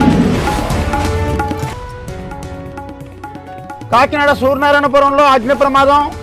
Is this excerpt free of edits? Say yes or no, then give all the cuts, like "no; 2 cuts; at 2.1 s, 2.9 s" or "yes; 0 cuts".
no; 1 cut; at 3.8 s